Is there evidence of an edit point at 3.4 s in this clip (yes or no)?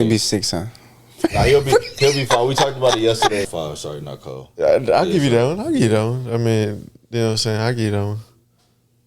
yes